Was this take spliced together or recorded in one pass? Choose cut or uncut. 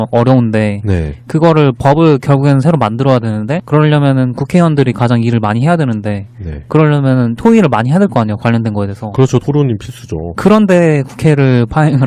uncut